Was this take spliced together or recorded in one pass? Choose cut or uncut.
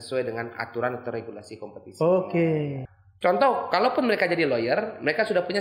cut